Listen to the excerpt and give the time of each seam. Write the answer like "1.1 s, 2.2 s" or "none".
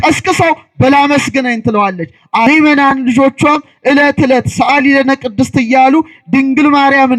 2.5 s